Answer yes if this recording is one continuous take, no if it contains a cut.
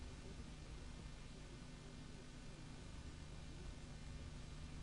no